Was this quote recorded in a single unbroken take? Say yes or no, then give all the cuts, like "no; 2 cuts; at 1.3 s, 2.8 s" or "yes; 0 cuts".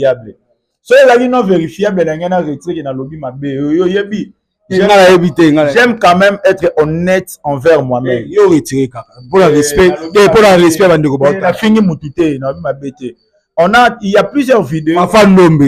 yes; 0 cuts